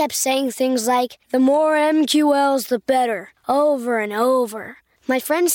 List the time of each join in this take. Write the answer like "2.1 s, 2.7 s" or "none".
none